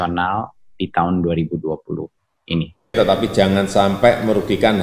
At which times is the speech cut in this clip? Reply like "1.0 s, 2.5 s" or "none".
2.9 s